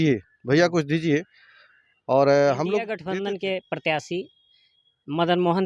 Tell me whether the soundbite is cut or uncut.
cut